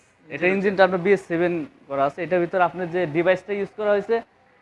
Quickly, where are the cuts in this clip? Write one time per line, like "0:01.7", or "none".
none